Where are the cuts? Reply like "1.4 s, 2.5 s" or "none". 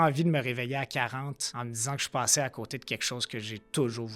1.4 s

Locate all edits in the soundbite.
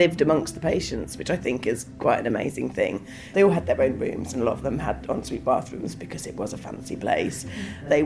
none

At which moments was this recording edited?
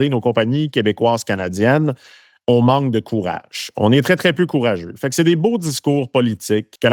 none

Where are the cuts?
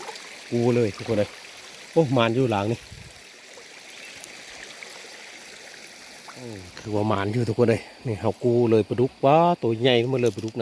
6.8 s

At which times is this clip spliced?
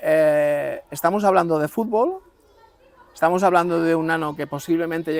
none

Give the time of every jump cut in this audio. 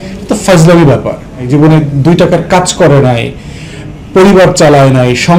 1.5 s

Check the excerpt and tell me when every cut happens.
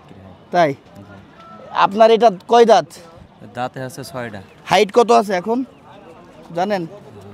none

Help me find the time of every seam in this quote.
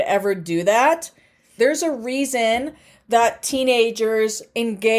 1.5 s

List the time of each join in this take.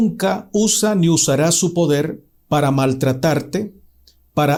none

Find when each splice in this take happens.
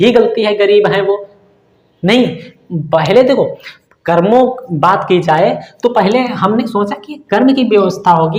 none

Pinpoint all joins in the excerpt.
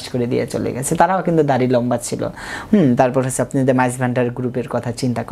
none

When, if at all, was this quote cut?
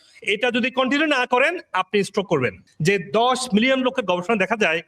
2.7 s

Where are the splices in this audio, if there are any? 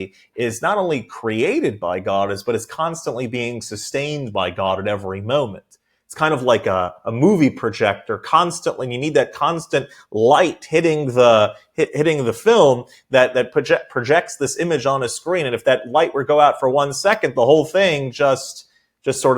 none

